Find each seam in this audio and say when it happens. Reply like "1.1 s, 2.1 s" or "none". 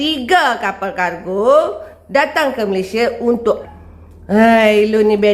3.6 s